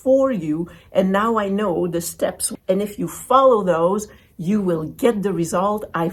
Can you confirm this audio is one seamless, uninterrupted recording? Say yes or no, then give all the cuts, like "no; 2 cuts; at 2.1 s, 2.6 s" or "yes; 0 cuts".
yes; 0 cuts